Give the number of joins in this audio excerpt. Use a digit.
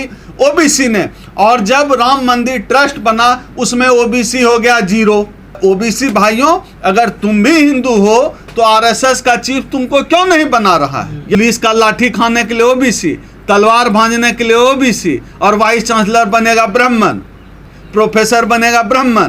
2